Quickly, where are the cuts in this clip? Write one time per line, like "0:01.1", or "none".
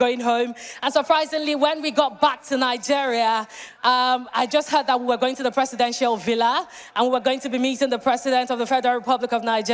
none